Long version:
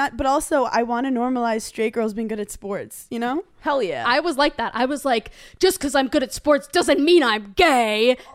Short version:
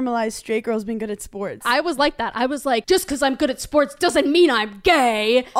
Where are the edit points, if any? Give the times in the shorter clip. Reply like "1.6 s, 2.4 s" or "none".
1.6 s, 2.8 s